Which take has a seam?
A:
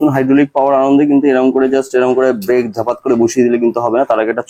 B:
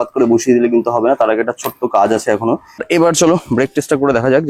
B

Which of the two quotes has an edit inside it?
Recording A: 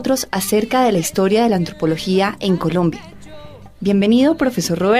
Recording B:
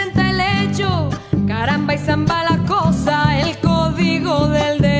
A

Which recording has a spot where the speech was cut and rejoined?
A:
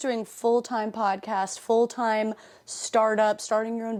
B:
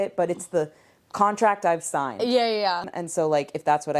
B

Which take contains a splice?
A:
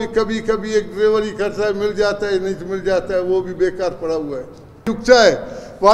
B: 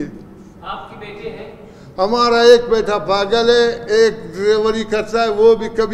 A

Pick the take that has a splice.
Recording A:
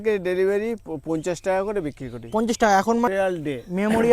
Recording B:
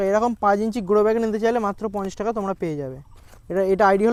A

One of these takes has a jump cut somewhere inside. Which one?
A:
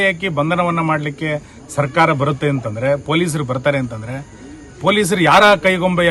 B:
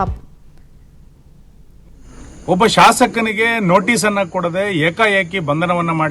B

